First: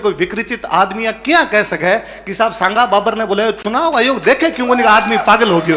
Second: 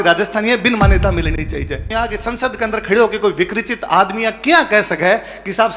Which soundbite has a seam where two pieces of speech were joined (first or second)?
second